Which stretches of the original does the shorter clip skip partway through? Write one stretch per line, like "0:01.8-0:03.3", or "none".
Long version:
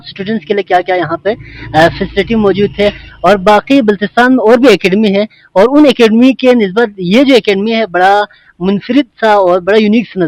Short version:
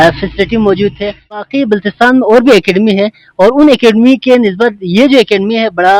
0:03.2-0:03.6